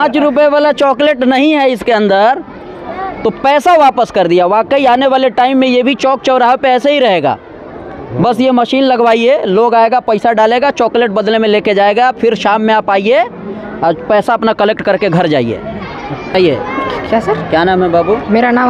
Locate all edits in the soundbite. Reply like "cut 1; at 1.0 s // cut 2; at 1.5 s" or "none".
none

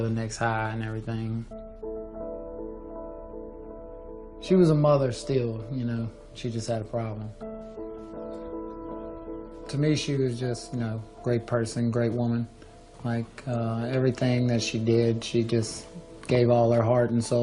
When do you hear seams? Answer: cut 1; at 6.9 s

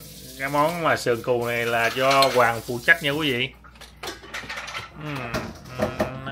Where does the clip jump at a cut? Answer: none

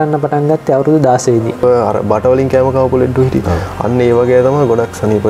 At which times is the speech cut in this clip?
cut 1; at 1.6 s

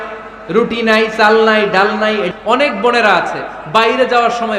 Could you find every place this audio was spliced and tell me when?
cut 1; at 2.3 s

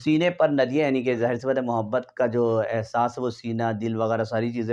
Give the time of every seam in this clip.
none

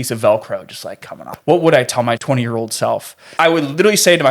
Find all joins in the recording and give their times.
cut 1; at 1.2 s // cut 2; at 2.2 s // cut 3; at 3.2 s

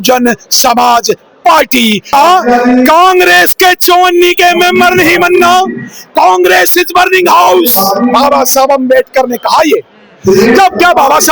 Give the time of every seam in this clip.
cut 1; at 2.0 s

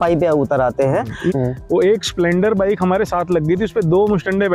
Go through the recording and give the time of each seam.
cut 1; at 1.3 s

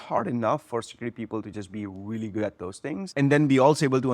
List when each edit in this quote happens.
cut 1; at 3.1 s

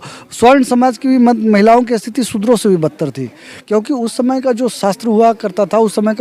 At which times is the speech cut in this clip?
none

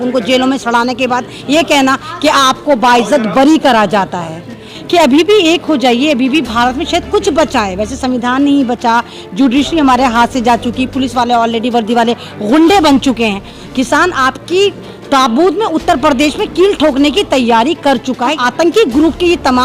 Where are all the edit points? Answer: cut 1; at 4.7 s // cut 2; at 13.5 s // cut 3; at 18.3 s

